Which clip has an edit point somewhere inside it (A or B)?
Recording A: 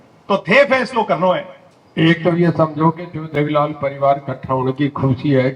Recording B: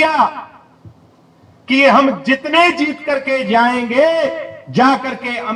A